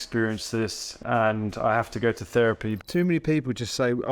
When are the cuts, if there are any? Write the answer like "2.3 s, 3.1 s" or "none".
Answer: 1.0 s, 2.8 s